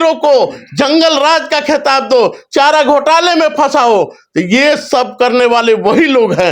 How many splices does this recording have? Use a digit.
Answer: 0